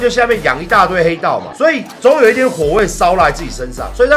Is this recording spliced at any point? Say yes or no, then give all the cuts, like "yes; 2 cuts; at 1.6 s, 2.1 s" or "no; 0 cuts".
no; 0 cuts